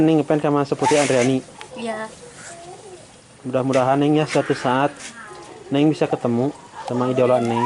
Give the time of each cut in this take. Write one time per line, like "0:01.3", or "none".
none